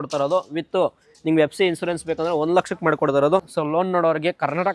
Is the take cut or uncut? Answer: cut